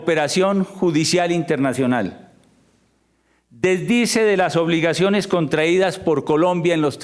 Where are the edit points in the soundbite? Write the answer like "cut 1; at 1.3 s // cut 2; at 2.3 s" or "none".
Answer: none